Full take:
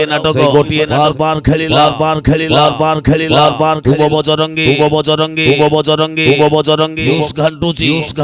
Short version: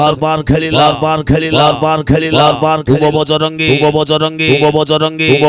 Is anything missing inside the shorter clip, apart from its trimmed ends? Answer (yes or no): no